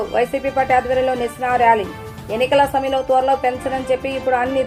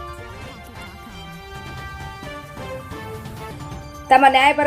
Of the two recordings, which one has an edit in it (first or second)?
second